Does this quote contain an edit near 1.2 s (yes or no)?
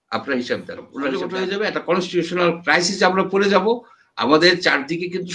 yes